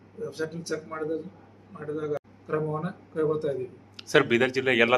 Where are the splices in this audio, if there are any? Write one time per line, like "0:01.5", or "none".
0:02.2